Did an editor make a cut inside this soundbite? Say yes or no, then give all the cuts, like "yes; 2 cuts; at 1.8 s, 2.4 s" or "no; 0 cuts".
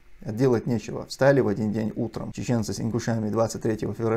yes; 1 cut; at 2.3 s